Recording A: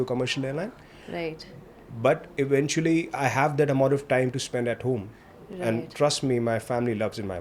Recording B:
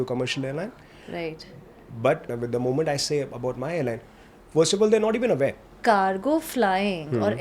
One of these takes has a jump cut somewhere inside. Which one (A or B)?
B